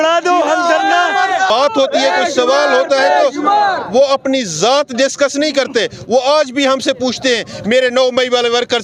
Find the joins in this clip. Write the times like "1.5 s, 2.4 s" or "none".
1.5 s